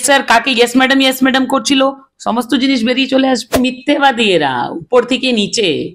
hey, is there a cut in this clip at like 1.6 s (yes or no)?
no